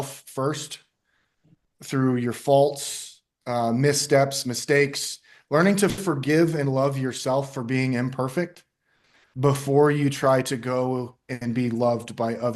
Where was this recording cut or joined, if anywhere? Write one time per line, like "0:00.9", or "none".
none